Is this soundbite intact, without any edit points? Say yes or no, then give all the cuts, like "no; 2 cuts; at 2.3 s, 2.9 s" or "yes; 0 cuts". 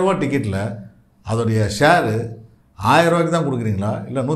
yes; 0 cuts